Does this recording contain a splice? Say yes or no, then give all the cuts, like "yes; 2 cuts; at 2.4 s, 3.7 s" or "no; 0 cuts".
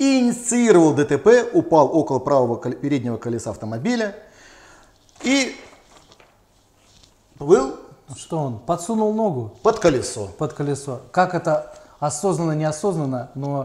no; 0 cuts